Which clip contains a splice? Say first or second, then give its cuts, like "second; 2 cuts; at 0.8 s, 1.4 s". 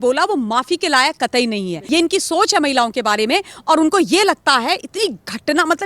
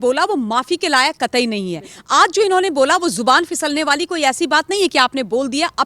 first; 1 cut; at 1.8 s